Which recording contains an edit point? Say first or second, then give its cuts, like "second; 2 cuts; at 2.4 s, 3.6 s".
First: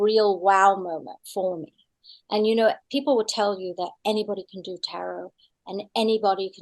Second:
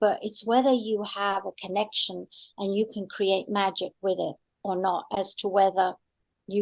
first; 1 cut; at 2.8 s